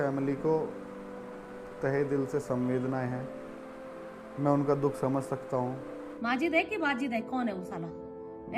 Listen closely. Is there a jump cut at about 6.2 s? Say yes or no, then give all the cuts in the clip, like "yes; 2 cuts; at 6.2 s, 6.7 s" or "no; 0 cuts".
yes; 1 cut; at 6.2 s